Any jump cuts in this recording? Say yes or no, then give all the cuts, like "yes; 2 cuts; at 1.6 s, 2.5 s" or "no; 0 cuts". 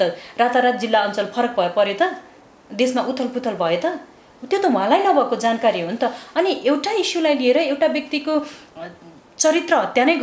no; 0 cuts